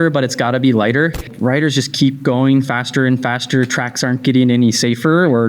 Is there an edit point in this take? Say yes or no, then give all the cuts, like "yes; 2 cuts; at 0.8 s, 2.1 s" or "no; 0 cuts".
yes; 1 cut; at 1.3 s